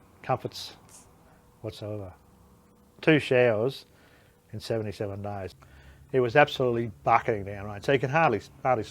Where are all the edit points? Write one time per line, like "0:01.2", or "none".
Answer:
0:05.5